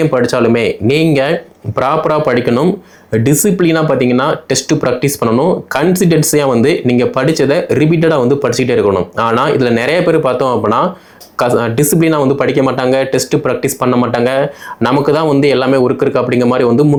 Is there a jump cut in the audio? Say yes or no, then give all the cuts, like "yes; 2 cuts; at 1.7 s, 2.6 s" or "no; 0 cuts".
no; 0 cuts